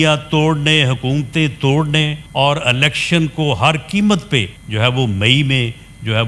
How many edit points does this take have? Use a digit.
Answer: 2